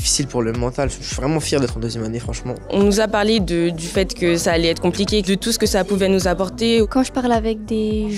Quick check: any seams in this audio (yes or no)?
yes